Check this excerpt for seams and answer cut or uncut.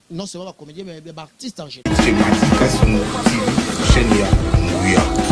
cut